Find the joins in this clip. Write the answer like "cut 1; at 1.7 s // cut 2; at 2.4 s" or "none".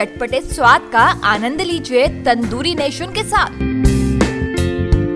none